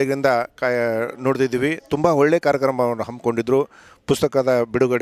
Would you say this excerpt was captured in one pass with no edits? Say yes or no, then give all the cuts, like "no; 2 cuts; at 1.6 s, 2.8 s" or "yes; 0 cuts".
yes; 0 cuts